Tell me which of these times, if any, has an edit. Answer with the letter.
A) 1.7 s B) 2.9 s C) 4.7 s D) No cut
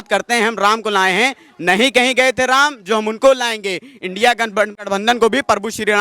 C